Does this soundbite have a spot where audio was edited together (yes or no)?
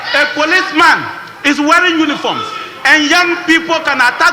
no